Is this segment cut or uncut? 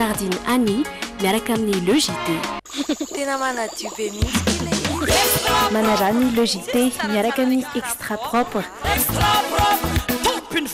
uncut